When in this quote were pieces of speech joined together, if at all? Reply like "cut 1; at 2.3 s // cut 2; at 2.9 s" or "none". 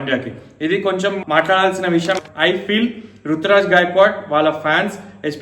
cut 1; at 2.2 s